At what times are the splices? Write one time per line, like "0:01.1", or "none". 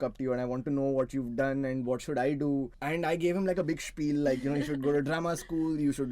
0:02.8